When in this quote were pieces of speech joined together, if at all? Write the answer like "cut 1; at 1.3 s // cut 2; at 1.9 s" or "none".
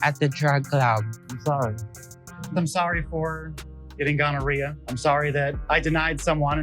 cut 1; at 1.1 s